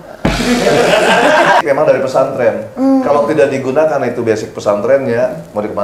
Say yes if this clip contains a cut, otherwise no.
yes